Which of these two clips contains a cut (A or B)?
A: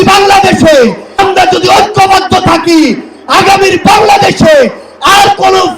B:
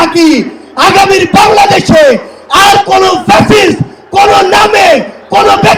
A